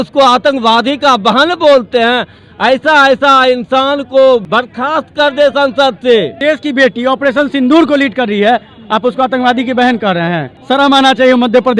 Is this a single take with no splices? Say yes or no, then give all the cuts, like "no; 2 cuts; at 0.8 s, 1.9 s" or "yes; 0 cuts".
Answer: no; 3 cuts; at 4.4 s, 6.4 s, 10.5 s